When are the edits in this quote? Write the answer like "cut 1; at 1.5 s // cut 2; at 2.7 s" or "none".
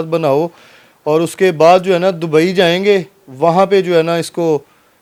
none